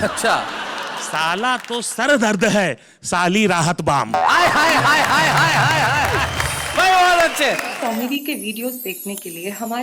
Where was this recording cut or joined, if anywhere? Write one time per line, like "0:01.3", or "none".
0:07.7